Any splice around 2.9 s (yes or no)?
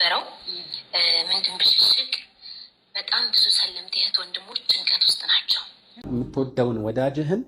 no